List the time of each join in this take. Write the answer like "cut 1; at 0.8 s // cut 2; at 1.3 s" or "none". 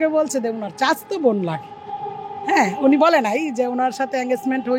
none